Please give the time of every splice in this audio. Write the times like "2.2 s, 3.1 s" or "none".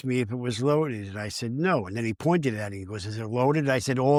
none